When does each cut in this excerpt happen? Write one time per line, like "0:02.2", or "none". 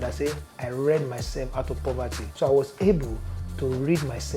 0:02.2